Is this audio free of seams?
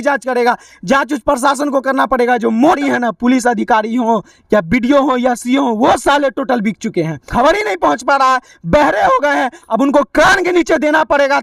no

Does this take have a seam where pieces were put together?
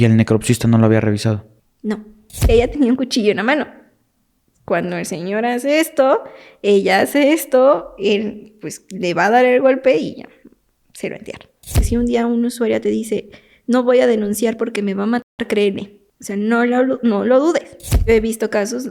yes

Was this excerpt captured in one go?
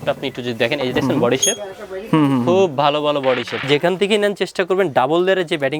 no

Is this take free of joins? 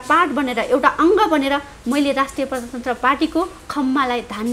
yes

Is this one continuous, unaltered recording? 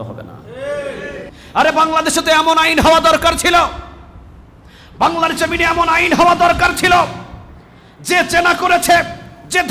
no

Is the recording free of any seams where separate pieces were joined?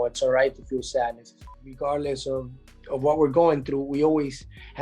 no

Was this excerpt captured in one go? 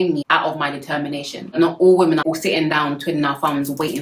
no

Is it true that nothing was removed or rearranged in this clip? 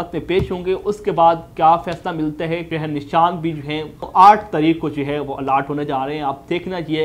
no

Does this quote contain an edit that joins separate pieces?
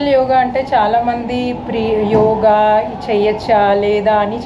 no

